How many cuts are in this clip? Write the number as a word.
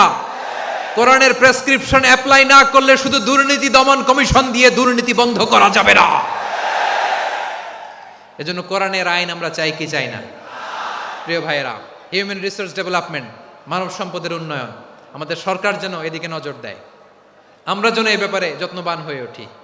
zero